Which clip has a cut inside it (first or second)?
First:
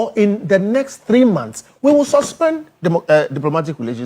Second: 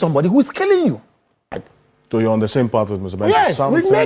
second